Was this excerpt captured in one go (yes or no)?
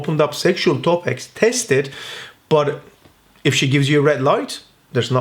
yes